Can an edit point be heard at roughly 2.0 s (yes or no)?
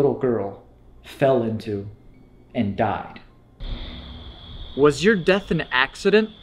no